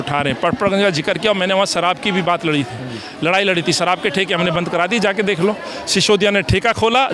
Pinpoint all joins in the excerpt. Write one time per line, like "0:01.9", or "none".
none

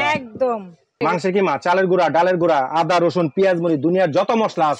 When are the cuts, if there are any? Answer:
0:01.0

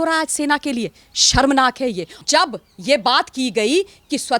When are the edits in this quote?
0:02.1

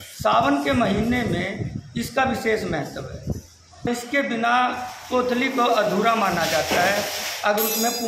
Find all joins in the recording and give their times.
0:03.9

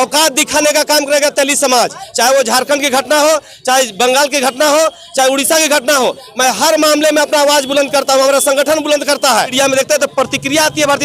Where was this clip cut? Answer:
0:02.0
0:09.5

